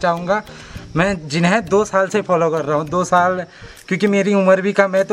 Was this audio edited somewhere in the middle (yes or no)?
no